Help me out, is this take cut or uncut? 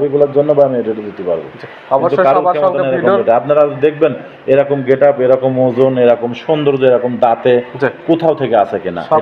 uncut